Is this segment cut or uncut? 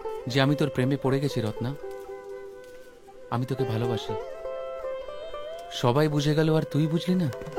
uncut